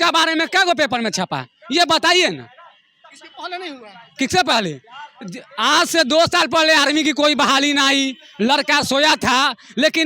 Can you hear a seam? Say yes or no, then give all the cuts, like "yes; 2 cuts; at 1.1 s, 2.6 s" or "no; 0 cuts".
no; 0 cuts